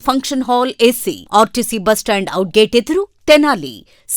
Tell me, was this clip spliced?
no; 0 cuts

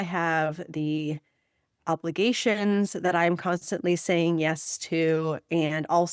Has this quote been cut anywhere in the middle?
no; 0 cuts

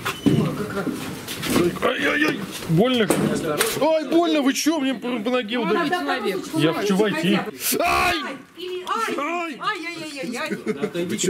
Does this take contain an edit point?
yes; 1 cut; at 7.6 s

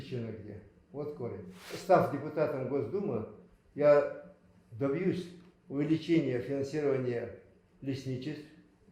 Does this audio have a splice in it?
yes; 1 cut; at 1.7 s

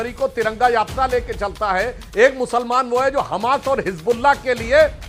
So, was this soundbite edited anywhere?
no; 0 cuts

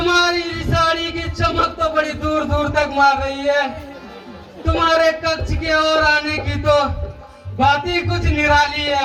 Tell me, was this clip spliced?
no; 0 cuts

